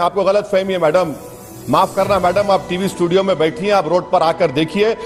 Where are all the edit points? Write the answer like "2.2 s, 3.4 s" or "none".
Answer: none